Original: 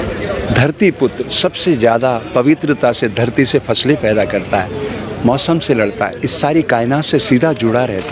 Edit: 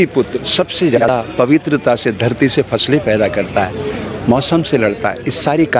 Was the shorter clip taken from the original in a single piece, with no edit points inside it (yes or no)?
no